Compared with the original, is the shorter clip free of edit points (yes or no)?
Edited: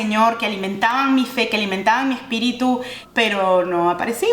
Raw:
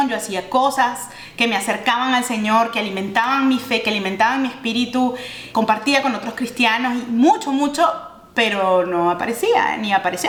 no